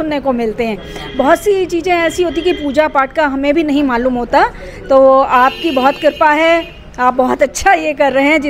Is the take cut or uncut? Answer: uncut